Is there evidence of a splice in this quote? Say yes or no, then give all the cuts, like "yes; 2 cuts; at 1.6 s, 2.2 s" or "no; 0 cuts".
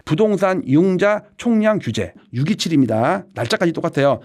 no; 0 cuts